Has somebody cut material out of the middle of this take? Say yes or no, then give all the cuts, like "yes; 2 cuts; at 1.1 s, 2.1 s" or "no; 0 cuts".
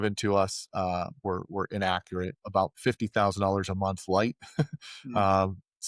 no; 0 cuts